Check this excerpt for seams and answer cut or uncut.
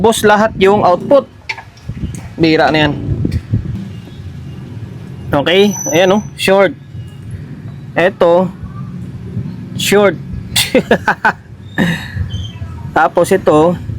cut